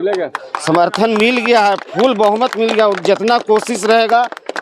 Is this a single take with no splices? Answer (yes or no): yes